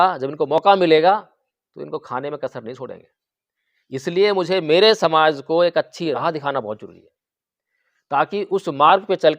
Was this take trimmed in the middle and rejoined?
yes; 1 cut; at 6.1 s

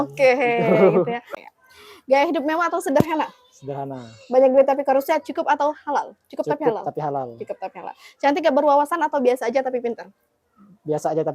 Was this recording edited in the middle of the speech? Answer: yes; 1 cut; at 1.3 s

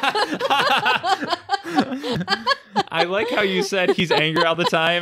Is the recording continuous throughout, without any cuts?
no; 1 cut; at 2.2 s

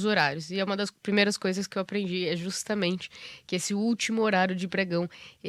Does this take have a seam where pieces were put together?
no; 0 cuts

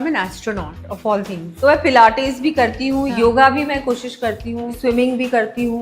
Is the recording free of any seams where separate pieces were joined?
no; 2 cuts; at 1.5 s, 4.8 s

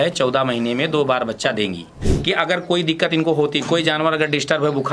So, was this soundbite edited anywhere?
yes; 1 cut; at 1.9 s

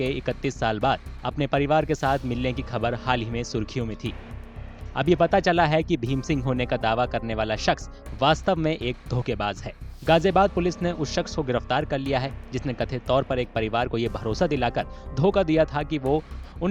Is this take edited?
no; 0 cuts

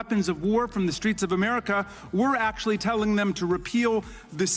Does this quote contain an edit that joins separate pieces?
no; 0 cuts

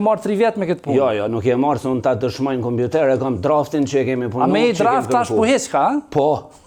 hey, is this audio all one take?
yes; 0 cuts

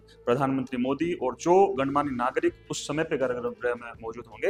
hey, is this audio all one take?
yes; 0 cuts

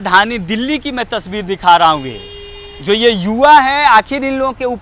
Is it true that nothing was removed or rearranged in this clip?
yes; 0 cuts

